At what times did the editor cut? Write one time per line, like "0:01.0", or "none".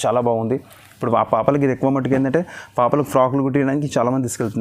none